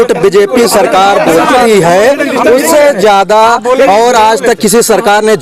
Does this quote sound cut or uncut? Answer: uncut